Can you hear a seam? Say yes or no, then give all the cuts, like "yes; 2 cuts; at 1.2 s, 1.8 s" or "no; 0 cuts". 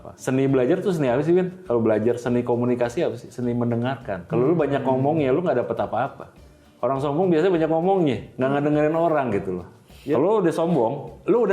yes; 2 cuts; at 4.1 s, 9.9 s